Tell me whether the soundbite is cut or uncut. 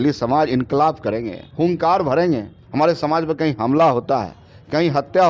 cut